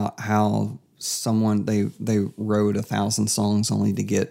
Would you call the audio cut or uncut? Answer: uncut